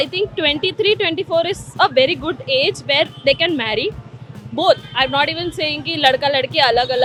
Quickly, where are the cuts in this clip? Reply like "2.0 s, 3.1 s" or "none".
none